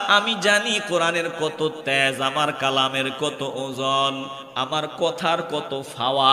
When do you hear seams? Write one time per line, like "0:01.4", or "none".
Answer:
none